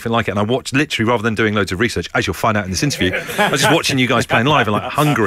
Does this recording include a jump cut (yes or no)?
no